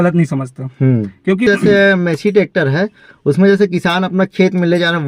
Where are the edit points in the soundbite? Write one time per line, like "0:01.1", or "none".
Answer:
0:01.5